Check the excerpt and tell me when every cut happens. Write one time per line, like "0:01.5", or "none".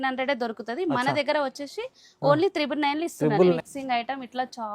0:03.6